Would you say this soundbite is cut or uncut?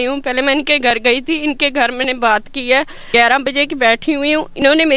cut